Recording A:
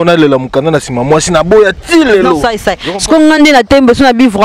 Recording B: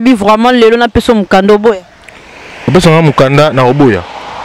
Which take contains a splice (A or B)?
A